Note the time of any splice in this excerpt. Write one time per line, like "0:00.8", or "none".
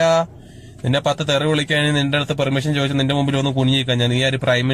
none